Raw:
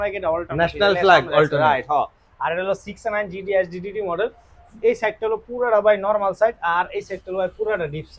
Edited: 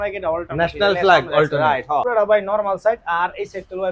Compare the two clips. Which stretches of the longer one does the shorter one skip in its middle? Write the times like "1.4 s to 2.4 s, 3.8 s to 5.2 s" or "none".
2.1 s to 5.6 s